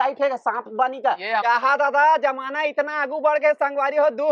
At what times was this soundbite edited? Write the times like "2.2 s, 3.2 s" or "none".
1.4 s